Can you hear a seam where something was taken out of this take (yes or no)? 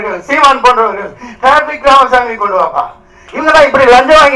no